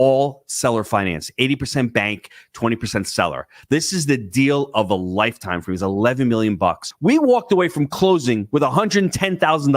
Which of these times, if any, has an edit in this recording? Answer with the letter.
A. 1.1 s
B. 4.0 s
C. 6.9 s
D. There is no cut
C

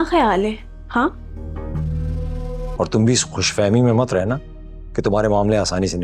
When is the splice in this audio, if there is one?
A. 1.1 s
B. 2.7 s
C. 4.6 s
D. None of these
B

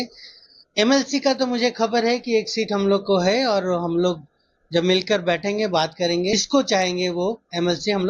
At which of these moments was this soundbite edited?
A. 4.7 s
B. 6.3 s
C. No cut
B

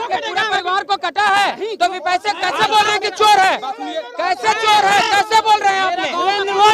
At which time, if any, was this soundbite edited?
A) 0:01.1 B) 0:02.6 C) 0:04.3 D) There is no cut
D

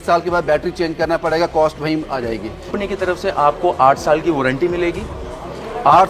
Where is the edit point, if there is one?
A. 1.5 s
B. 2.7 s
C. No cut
B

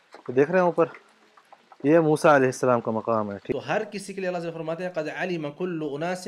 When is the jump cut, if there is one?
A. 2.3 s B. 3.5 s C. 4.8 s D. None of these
B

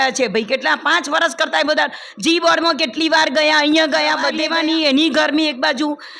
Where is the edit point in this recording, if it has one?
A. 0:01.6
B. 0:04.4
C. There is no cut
B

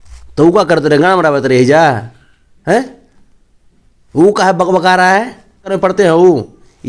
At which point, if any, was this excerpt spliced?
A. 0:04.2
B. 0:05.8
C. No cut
B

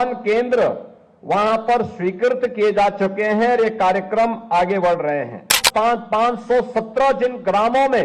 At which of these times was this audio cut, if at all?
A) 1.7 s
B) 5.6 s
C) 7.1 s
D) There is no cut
B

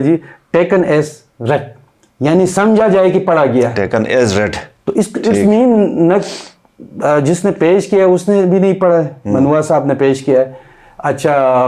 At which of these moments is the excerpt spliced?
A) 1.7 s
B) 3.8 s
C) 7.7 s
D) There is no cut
D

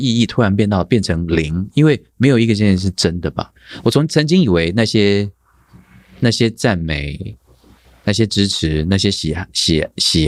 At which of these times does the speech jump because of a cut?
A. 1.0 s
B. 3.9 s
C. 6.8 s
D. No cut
D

